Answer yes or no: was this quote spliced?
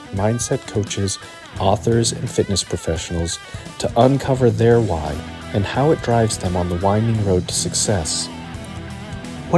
no